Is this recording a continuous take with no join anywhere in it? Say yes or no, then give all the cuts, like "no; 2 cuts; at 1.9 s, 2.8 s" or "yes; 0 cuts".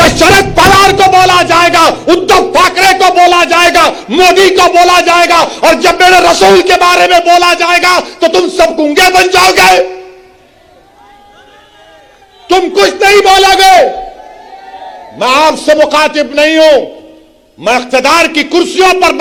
yes; 0 cuts